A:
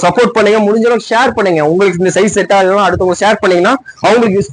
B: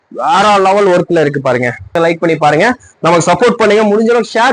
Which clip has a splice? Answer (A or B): B